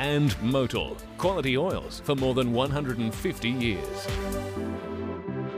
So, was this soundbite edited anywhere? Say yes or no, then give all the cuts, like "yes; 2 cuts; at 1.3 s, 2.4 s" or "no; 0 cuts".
yes; 1 cut; at 3.8 s